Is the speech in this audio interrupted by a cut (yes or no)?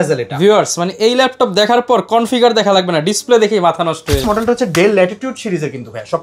yes